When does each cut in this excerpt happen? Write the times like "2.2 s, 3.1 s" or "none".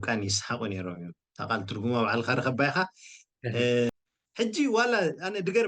3.9 s